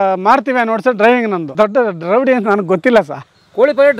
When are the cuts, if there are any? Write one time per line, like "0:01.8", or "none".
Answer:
0:01.5

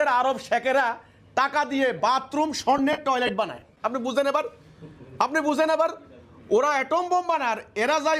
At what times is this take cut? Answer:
none

